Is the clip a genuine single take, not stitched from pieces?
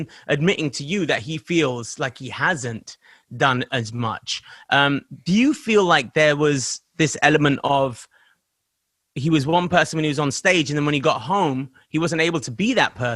yes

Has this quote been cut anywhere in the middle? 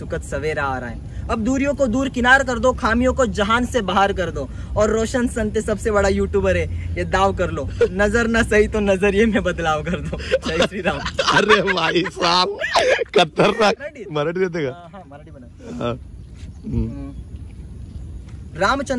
yes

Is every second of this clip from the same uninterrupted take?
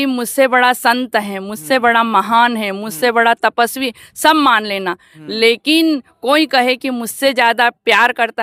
yes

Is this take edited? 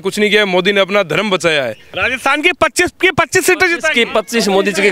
yes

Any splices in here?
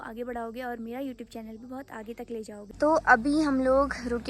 yes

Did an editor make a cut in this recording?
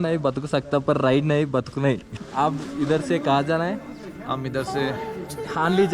yes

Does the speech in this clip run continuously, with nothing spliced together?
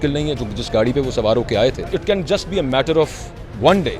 no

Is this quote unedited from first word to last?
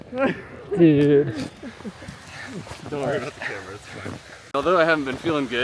no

